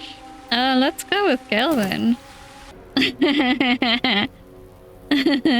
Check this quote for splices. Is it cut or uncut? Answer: cut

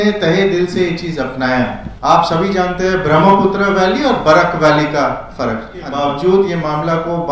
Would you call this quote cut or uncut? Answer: cut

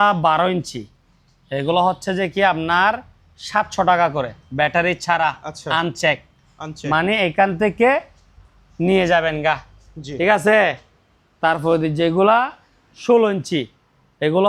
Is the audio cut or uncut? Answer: uncut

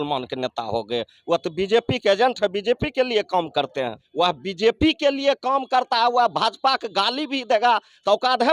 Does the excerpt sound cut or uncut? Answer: cut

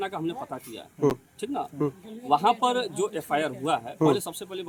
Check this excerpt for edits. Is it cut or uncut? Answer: uncut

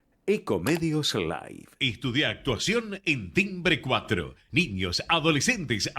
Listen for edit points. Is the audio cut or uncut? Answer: cut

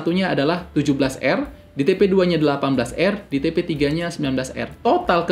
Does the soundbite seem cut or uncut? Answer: uncut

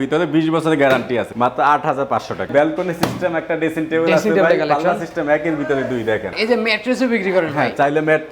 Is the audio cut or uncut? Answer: cut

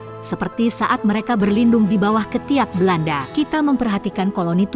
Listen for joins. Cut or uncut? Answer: cut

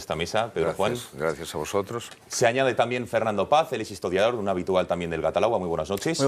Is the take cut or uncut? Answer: cut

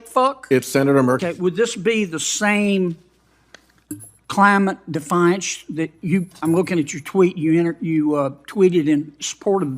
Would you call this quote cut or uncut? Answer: cut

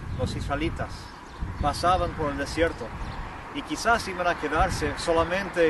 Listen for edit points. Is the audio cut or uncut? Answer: uncut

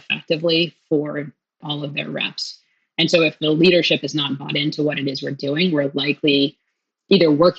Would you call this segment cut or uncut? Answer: cut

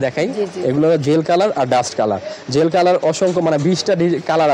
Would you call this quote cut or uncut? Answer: uncut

